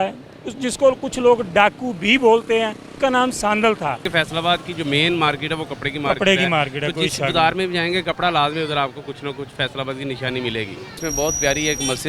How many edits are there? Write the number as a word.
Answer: three